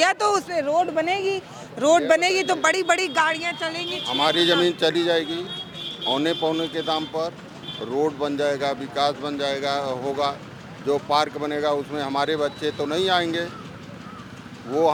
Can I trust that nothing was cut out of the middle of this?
yes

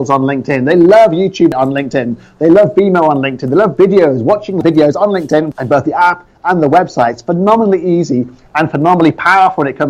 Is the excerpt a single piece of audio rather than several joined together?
no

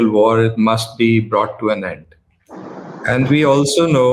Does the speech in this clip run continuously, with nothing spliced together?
yes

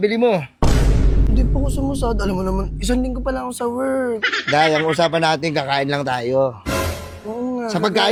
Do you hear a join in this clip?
no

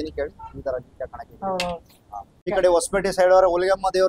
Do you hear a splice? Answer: yes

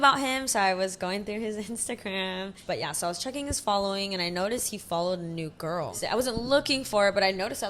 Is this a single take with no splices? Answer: no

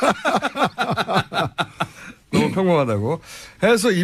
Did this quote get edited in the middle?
no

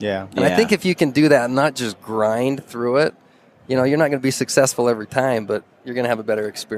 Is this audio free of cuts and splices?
yes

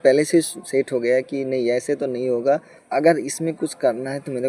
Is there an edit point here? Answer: yes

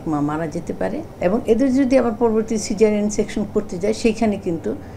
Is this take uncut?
yes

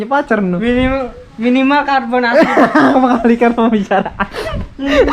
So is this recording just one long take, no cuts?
yes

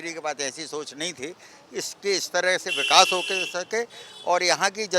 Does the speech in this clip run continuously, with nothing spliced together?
yes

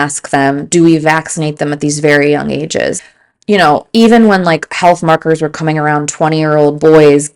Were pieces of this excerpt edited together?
yes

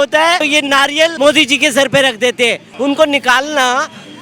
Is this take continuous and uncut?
no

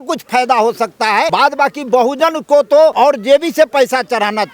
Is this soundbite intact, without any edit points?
no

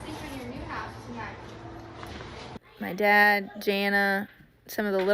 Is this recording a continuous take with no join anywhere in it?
no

